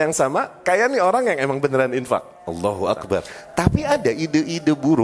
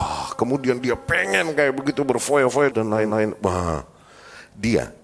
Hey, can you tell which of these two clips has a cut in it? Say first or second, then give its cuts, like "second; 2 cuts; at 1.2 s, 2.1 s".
first; 1 cut; at 3.4 s